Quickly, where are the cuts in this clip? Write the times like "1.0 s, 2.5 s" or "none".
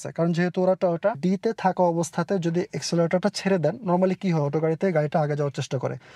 1.2 s